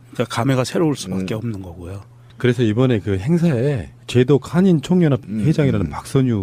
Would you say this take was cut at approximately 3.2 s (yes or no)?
yes